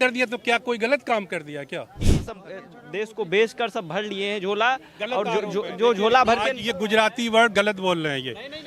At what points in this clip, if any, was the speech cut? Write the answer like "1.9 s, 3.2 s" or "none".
2.0 s

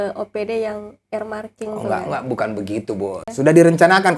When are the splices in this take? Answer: 3.3 s

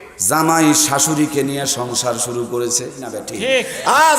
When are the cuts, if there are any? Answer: 3.2 s

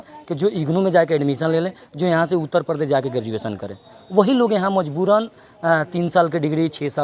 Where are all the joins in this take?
none

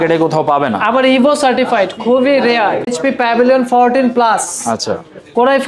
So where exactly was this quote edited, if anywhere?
2.9 s

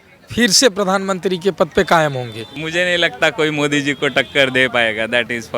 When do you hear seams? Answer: 2.6 s

